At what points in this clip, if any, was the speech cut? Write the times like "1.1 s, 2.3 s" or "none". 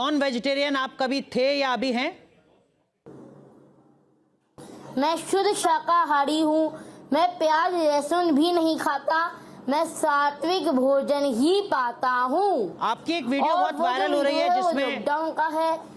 none